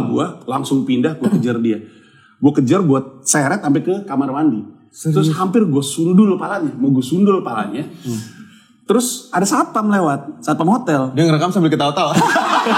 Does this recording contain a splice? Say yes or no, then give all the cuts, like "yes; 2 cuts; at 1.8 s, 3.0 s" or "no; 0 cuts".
no; 0 cuts